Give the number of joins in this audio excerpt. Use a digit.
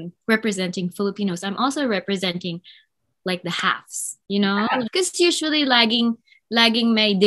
1